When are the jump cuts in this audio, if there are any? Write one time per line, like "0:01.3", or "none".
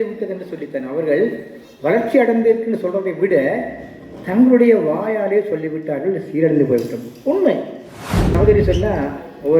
0:08.3